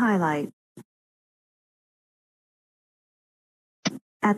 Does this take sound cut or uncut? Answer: uncut